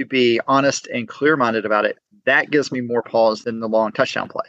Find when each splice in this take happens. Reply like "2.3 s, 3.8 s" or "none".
3.4 s